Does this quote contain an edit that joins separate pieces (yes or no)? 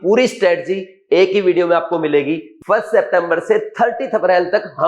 yes